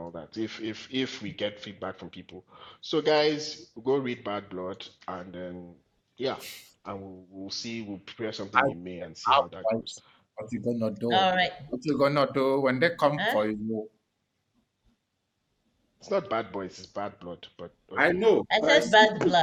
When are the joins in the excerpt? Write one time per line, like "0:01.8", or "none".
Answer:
none